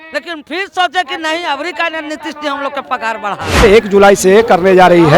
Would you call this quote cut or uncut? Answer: cut